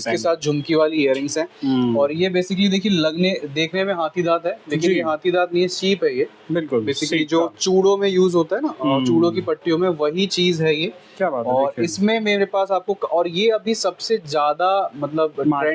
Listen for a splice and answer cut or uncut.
uncut